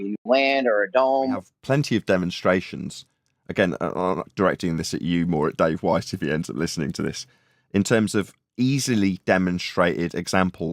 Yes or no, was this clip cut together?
yes